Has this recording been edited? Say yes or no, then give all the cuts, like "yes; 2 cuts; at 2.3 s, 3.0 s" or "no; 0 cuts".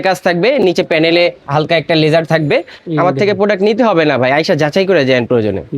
yes; 2 cuts; at 1.4 s, 2.8 s